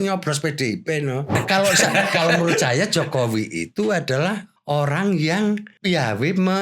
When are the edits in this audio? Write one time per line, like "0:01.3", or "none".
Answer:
0:01.4
0:04.5
0:05.7